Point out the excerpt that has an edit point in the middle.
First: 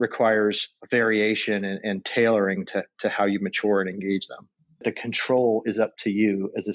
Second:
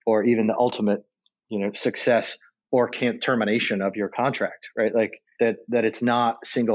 first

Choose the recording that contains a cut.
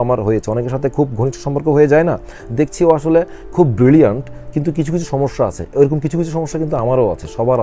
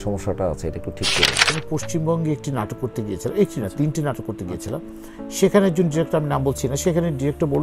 second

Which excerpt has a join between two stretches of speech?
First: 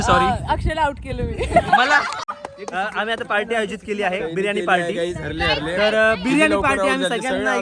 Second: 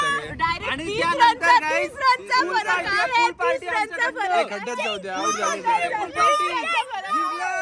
first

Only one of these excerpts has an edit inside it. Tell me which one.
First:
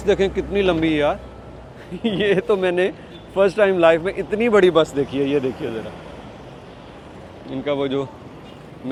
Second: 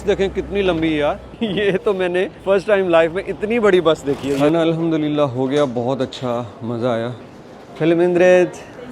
second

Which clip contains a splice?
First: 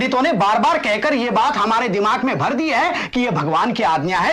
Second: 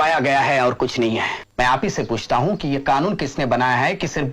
second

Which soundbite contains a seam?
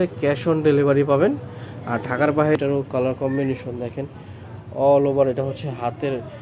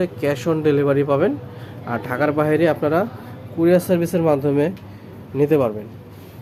first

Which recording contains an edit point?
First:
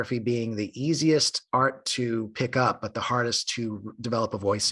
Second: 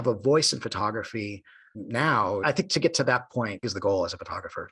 second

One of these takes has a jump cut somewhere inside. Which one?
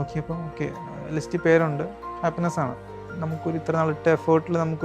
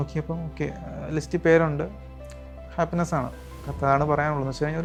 first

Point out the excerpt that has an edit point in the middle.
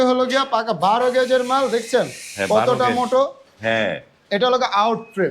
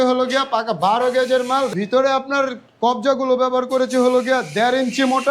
second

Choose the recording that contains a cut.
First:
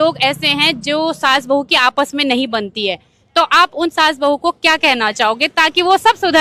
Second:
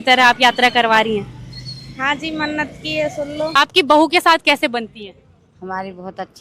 second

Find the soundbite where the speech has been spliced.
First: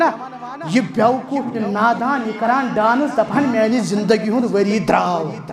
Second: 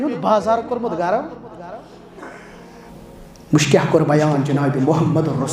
second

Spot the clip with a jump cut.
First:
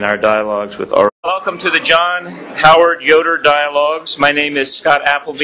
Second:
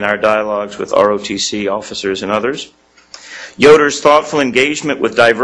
second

